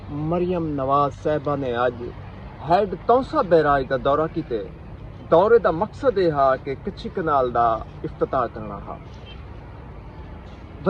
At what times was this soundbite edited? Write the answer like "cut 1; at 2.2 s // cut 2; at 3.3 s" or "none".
none